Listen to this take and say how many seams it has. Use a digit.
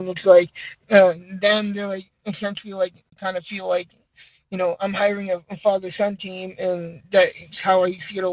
1